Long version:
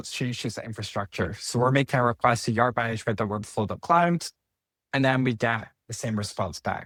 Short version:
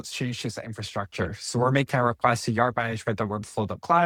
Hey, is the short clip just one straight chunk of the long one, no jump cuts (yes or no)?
yes